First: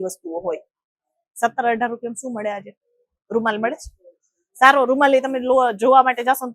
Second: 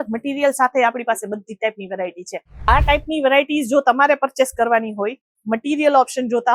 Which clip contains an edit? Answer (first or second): second